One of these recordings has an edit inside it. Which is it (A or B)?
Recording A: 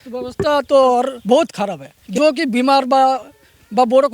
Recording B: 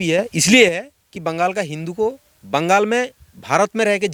A